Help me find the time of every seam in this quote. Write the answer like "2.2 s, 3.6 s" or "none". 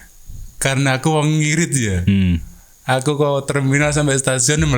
none